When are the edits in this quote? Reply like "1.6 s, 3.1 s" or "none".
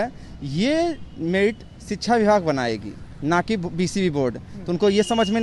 none